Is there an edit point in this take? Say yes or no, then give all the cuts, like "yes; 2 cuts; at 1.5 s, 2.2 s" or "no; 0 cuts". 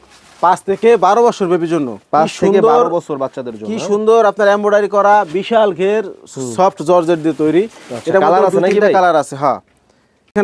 no; 0 cuts